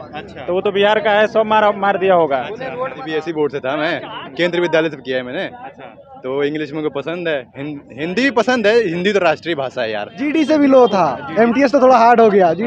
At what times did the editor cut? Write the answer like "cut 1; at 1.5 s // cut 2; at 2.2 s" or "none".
cut 1; at 3.0 s // cut 2; at 10.2 s